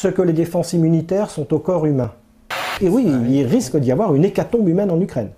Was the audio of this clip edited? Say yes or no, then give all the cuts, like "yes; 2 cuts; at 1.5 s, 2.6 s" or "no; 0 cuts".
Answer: yes; 1 cut; at 2.7 s